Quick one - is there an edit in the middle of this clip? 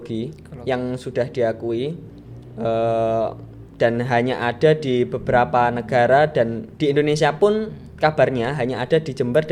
no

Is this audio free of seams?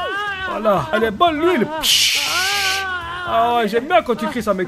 no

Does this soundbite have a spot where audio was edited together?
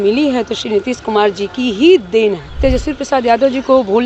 yes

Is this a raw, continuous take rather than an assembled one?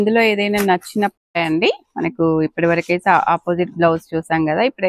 no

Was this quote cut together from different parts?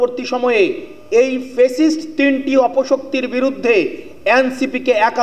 no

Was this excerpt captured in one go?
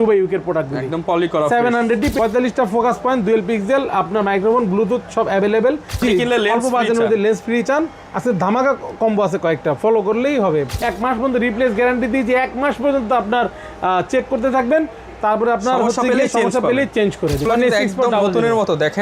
no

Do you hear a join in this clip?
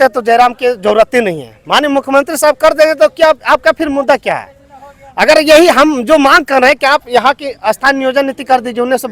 no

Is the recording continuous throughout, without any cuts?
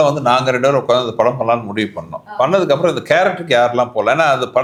yes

